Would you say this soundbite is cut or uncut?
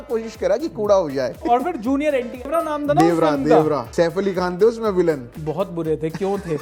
cut